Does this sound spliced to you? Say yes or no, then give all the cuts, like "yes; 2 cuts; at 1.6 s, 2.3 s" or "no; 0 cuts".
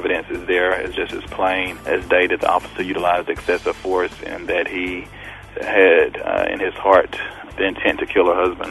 yes; 3 cuts; at 1.7 s, 5.4 s, 7.4 s